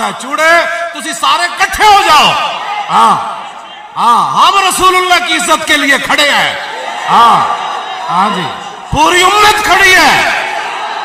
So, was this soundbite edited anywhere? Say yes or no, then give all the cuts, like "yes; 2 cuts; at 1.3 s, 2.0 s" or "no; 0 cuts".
no; 0 cuts